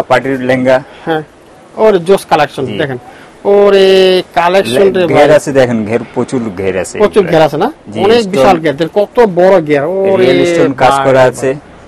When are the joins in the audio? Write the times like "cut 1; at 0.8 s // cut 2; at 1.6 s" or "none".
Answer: none